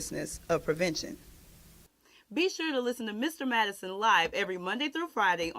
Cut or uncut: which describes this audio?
cut